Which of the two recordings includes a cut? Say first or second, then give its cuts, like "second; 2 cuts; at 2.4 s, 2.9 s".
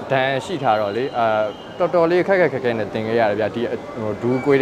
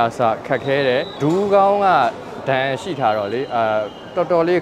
second; 1 cut; at 1.1 s